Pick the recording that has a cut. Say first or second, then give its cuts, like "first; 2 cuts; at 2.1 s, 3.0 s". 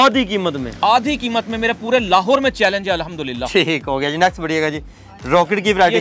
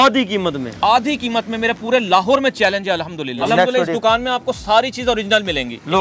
second; 1 cut; at 3.4 s